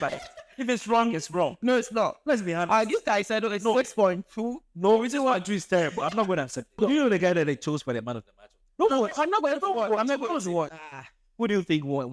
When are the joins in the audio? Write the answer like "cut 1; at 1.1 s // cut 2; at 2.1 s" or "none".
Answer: cut 1; at 6.8 s // cut 2; at 8.6 s // cut 3; at 10.7 s